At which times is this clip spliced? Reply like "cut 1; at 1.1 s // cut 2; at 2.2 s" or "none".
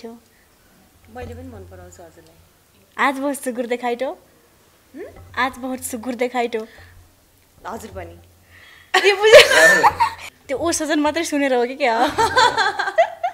cut 1; at 2.7 s // cut 2; at 10.3 s